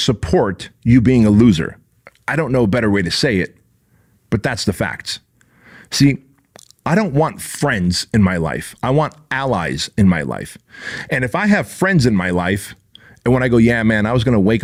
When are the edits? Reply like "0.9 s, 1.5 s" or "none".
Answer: none

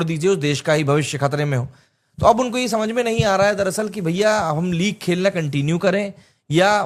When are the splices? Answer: none

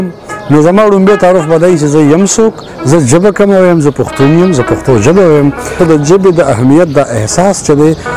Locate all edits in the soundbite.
5.7 s

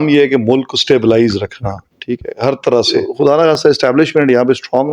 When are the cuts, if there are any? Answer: 3.0 s

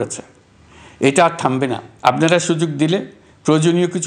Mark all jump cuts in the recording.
1.9 s

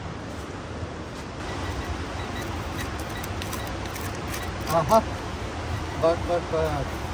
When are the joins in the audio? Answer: 1.4 s

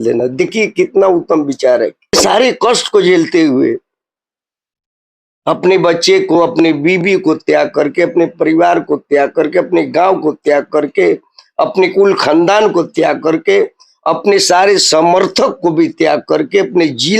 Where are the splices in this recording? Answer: 2.2 s

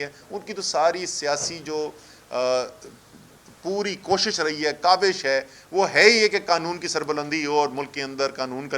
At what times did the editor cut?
none

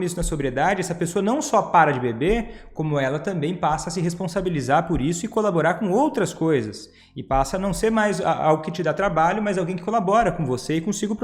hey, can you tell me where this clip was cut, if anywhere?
none

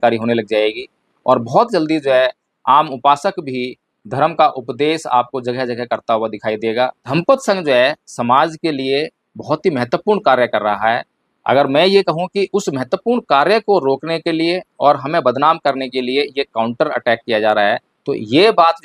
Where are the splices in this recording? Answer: 7.0 s

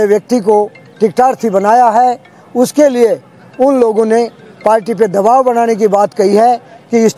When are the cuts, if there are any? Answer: none

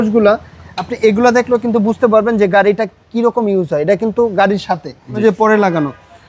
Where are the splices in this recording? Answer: 5.2 s

